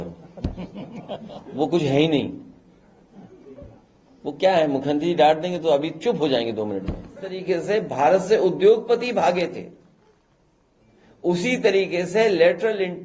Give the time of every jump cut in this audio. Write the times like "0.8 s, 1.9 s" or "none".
7.4 s